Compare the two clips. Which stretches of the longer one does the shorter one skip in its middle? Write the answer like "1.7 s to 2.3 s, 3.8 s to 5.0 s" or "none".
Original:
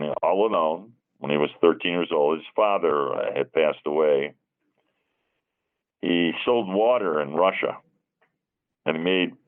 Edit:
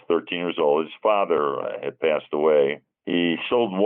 4.4 s to 5.9 s